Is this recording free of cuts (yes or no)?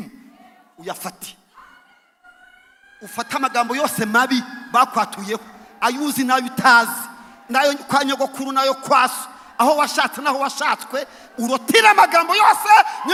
yes